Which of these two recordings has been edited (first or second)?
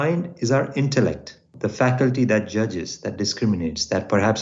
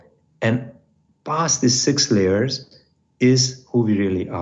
first